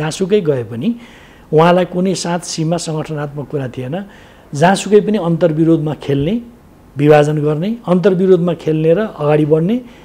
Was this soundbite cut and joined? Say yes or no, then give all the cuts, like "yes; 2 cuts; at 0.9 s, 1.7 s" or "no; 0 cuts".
no; 0 cuts